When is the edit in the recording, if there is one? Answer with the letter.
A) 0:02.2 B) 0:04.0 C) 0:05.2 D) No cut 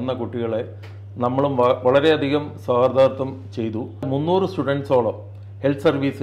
B